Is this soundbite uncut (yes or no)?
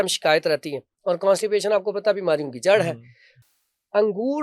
yes